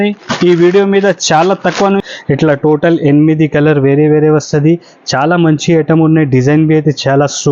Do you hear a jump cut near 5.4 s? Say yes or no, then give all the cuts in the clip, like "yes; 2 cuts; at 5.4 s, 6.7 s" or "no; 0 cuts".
no; 1 cut; at 2.0 s